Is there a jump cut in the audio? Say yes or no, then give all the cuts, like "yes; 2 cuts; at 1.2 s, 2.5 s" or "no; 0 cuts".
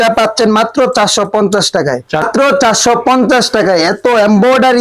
no; 0 cuts